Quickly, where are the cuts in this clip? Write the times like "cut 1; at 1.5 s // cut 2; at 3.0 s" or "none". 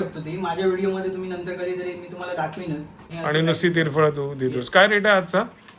cut 1; at 3.1 s